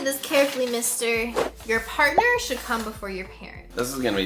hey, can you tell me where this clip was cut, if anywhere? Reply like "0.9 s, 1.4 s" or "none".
1.3 s